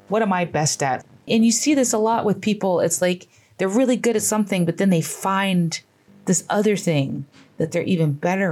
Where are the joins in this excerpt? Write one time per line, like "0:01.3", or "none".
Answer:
0:01.0